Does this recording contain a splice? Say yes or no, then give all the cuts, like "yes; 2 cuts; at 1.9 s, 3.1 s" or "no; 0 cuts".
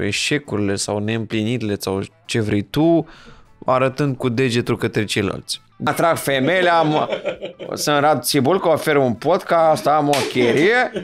yes; 1 cut; at 5.9 s